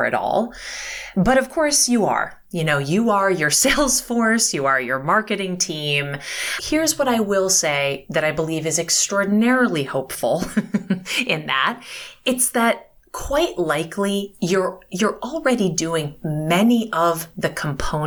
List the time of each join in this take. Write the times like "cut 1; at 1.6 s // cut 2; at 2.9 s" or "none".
cut 1; at 6.6 s